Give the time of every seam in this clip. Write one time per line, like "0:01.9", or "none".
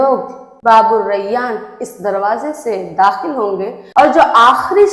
none